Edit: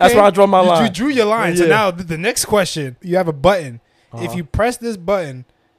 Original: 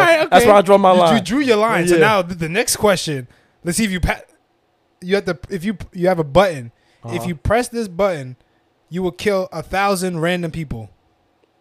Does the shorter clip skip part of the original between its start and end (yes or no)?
yes